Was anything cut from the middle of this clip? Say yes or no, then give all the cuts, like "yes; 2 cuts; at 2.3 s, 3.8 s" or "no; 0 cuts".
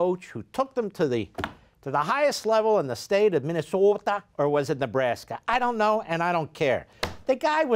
no; 0 cuts